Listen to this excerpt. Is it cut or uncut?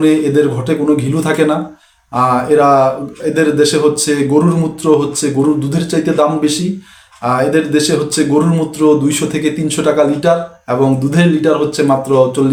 uncut